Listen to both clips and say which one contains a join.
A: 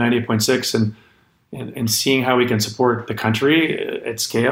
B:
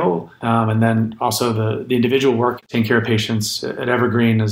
B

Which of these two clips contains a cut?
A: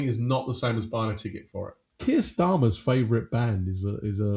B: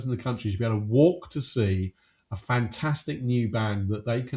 A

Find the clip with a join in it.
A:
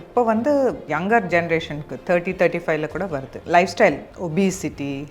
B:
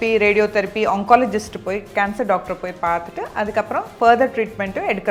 A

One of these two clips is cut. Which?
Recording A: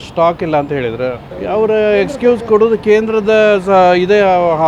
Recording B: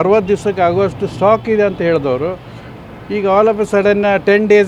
A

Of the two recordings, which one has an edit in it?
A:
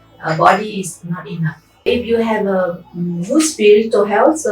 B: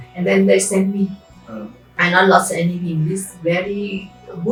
A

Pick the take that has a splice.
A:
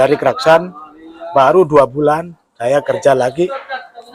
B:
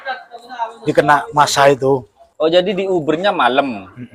B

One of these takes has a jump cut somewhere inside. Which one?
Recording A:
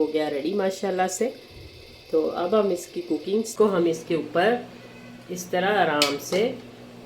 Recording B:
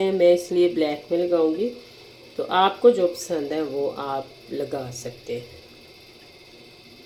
A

